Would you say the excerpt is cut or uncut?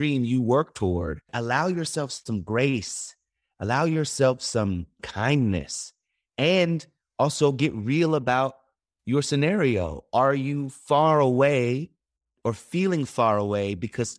cut